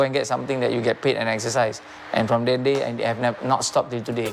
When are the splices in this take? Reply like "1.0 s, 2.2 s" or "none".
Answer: none